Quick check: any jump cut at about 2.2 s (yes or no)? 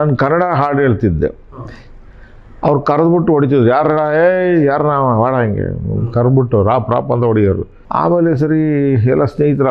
no